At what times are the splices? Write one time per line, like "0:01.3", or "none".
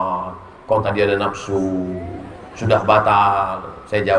none

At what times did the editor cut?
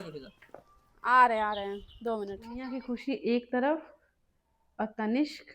0:02.5

